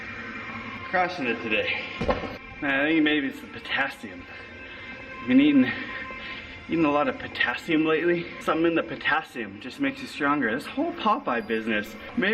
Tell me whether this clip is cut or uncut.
cut